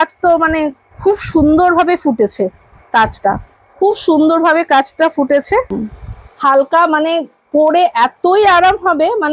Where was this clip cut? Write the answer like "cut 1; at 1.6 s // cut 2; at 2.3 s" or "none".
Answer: cut 1; at 5.7 s